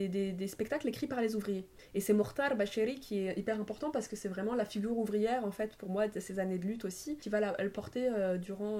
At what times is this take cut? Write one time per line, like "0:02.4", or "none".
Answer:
0:01.8
0:07.2